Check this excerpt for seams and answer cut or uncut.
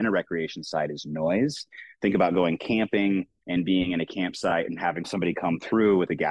cut